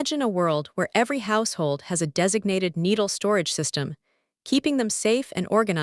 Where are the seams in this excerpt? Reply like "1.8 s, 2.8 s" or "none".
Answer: none